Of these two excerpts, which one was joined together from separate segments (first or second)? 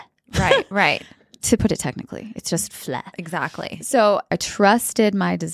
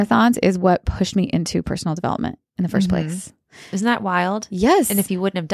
first